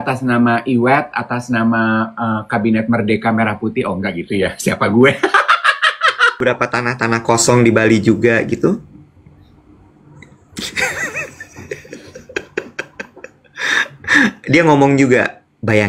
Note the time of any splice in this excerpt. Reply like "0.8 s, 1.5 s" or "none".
6.4 s